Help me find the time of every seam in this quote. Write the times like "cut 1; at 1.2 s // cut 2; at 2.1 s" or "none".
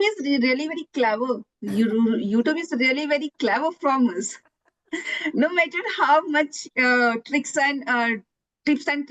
none

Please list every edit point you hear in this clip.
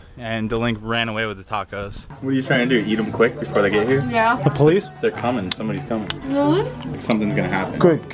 cut 1; at 2.1 s // cut 2; at 6.8 s

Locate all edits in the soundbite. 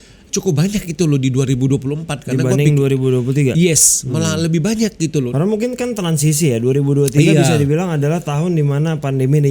cut 1; at 5.3 s

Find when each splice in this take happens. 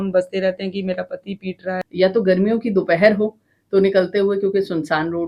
cut 1; at 1.8 s

